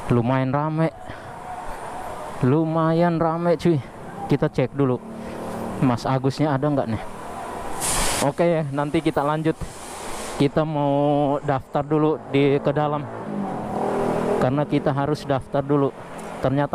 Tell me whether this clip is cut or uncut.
cut